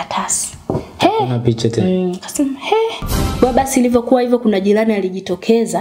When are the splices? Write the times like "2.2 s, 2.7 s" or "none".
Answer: 3.3 s